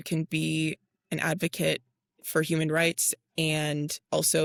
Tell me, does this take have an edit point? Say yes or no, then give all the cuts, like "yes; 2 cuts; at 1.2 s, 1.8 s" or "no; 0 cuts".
no; 0 cuts